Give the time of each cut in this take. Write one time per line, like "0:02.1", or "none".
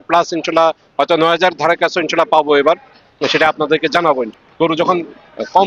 0:04.4